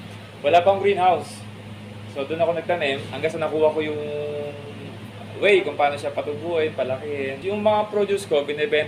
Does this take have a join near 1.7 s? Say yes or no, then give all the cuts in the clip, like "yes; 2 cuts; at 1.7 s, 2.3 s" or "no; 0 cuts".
no; 2 cuts; at 3.1 s, 7.4 s